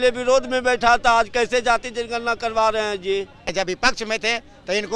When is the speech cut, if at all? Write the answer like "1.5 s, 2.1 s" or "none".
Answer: 3.5 s

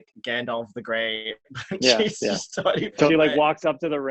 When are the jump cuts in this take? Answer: none

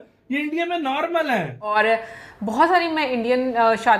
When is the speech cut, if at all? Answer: 1.7 s

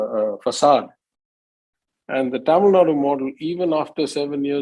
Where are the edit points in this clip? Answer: none

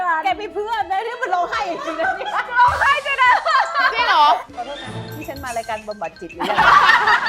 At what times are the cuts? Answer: 4.5 s

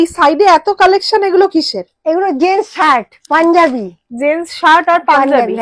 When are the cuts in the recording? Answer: none

